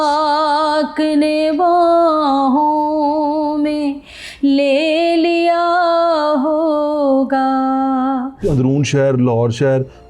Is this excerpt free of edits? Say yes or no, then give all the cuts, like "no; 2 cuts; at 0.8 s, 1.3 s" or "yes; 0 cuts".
no; 1 cut; at 8.4 s